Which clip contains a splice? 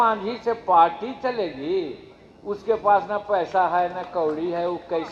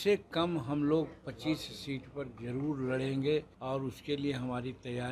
second; 1 cut; at 3.5 s

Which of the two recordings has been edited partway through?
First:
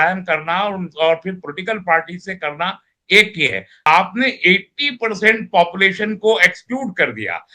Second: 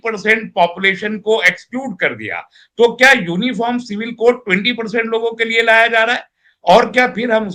first; 1 cut; at 3.9 s

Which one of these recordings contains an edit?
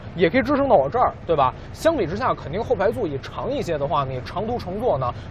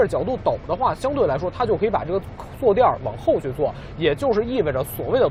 first; 1 cut; at 2.4 s

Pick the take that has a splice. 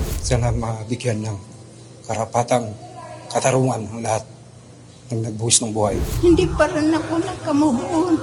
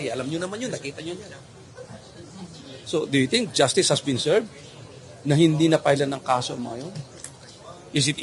first; 1 cut; at 6.1 s

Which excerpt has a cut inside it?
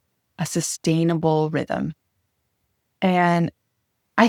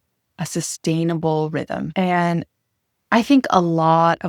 second; 1 cut; at 1.9 s

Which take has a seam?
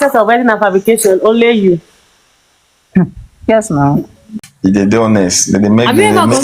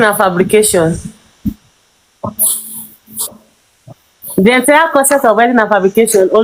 first; 1 cut; at 4.5 s

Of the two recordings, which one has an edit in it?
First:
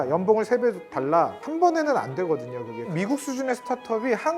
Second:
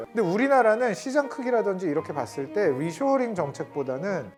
first; 2 cuts; at 1.4 s, 2.9 s

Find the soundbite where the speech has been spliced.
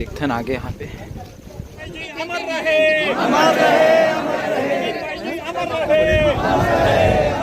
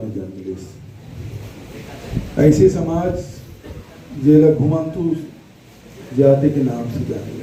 first; 1 cut; at 2.0 s

